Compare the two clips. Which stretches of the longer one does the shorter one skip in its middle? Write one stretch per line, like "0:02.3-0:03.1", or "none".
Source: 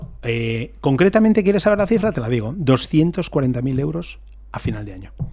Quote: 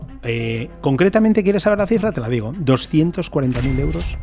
none

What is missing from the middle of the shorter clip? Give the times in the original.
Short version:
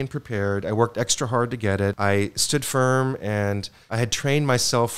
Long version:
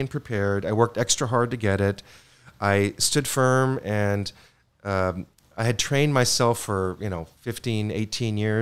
0:02.0-0:02.6
0:04.4-0:05.4

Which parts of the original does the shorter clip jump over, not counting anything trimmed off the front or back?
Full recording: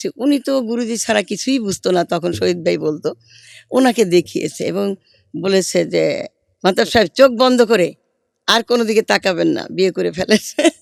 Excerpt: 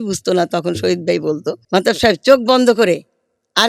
0:03.1-0:06.5

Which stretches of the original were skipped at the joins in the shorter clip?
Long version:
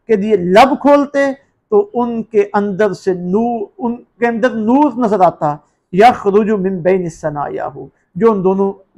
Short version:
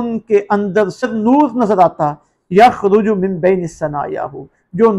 0:03.1-0:04.5

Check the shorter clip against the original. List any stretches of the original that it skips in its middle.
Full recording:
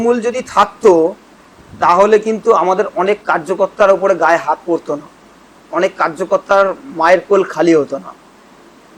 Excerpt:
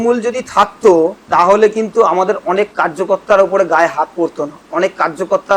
0:01.2-0:01.7
0:05.0-0:05.5

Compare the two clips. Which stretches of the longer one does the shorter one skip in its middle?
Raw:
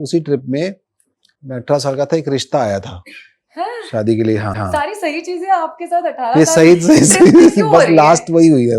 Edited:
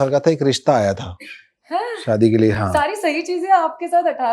0:04.4-0:04.6

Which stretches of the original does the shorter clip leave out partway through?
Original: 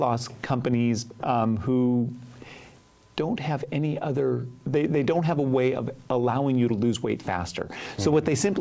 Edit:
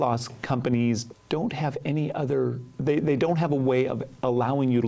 0:01.1-0:03.0

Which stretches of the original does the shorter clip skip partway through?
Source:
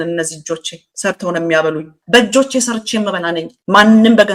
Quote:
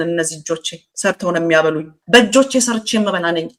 none

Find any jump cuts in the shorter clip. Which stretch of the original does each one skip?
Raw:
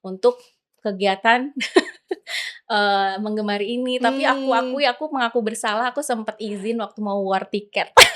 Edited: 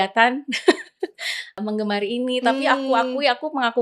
0:02.6-0:03.1

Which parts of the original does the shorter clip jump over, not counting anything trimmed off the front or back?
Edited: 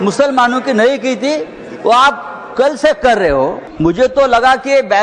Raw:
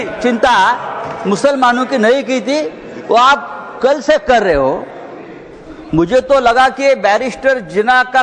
0:04.9-0:05.8

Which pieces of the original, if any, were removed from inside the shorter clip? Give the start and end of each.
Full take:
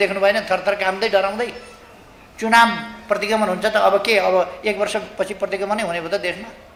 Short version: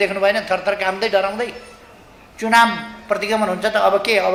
none

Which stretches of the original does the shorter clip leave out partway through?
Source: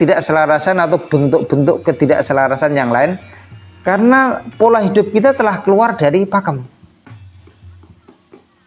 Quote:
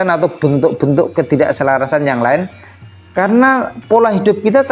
none

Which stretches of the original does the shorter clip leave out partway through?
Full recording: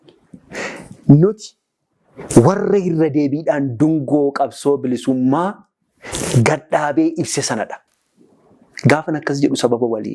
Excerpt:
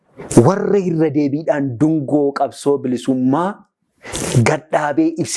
none

